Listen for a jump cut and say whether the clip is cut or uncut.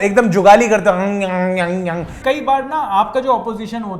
cut